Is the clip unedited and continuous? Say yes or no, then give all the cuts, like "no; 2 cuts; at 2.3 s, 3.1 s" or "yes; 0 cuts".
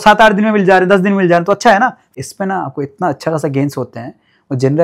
no; 1 cut; at 2.0 s